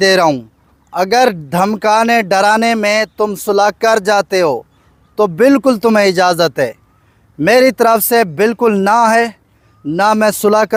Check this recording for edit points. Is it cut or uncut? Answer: uncut